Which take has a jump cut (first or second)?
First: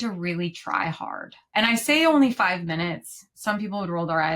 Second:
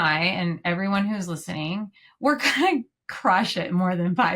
first